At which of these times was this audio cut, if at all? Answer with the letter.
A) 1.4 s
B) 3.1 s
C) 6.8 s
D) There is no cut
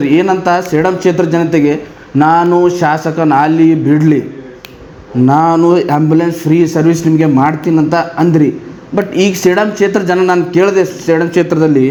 D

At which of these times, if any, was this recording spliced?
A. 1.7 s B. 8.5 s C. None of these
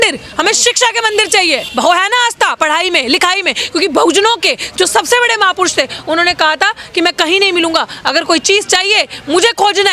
A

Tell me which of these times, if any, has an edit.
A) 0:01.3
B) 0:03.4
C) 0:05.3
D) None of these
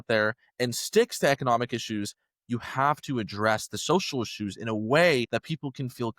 C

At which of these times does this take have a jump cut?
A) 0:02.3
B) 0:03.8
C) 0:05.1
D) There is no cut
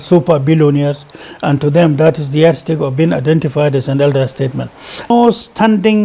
C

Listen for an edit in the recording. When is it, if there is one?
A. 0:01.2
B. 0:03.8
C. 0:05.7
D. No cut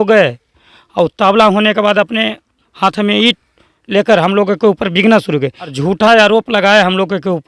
C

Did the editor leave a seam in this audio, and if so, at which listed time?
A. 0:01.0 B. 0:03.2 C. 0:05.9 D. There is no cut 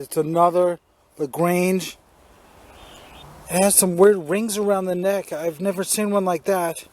B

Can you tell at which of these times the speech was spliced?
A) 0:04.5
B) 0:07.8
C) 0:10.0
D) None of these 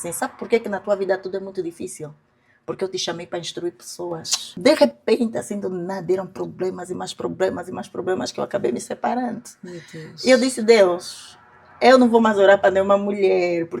A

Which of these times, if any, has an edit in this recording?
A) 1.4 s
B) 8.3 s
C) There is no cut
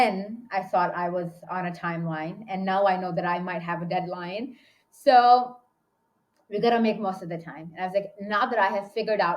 A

